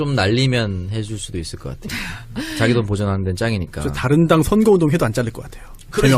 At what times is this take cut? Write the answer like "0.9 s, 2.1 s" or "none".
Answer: 3.3 s